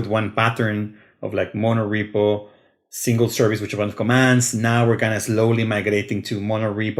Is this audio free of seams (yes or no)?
yes